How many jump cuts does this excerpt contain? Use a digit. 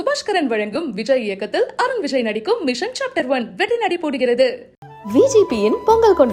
0